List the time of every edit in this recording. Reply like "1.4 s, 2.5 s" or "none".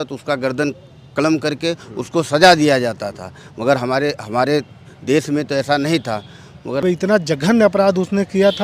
6.8 s